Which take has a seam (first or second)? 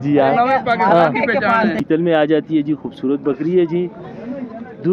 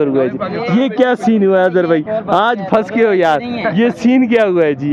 first